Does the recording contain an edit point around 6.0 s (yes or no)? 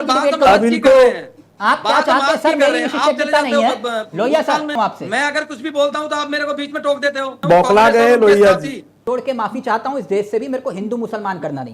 no